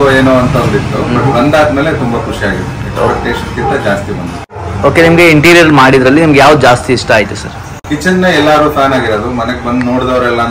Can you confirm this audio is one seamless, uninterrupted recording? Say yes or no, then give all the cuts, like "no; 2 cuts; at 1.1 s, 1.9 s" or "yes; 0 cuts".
yes; 0 cuts